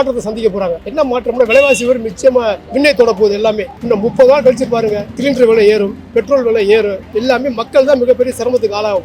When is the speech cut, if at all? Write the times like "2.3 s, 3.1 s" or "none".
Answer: 0.8 s, 2.6 s, 3.7 s